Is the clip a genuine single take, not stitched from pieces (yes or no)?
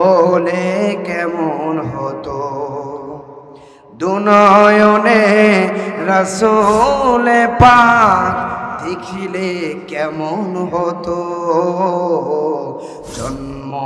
yes